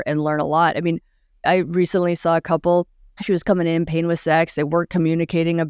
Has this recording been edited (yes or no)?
no